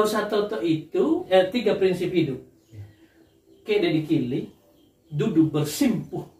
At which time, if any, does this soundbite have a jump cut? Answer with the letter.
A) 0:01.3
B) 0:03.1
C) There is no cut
A